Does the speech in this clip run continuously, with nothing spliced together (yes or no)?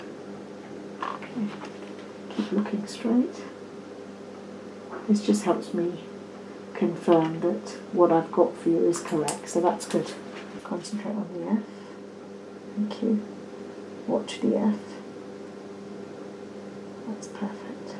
no